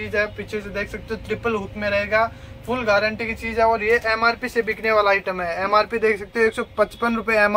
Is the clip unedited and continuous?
yes; 0 cuts

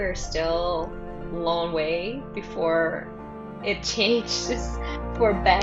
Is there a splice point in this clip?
no; 0 cuts

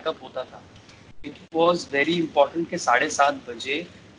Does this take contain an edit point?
no; 0 cuts

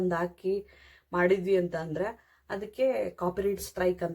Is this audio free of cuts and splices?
yes; 0 cuts

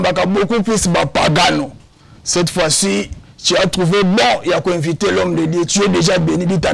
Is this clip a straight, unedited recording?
yes; 0 cuts

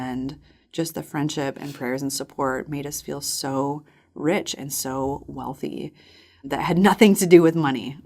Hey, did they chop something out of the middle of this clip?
yes; 1 cut; at 6.5 s

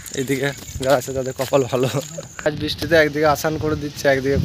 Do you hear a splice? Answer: yes; 1 cut; at 2.5 s

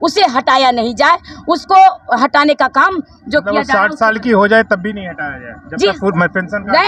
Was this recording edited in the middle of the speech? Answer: no; 0 cuts

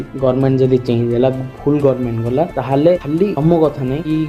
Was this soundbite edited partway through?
no; 0 cuts

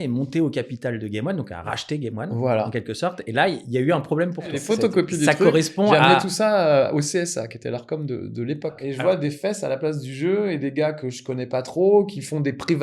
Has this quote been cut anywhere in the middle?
yes; 2 cuts; at 4.6 s, 8.8 s

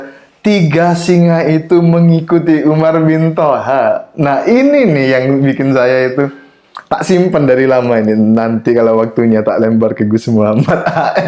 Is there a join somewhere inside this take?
no; 0 cuts

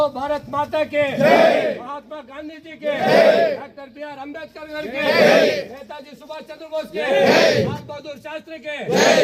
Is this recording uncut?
yes; 0 cuts

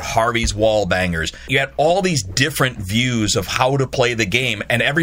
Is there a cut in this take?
yes; 1 cut; at 1.4 s

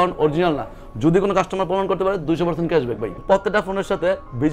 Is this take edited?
yes; 1 cut; at 3.2 s

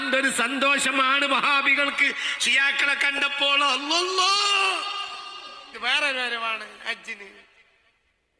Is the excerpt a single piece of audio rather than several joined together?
no; 1 cut; at 5.7 s

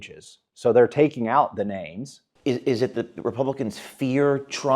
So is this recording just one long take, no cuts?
no; 1 cut; at 2.2 s

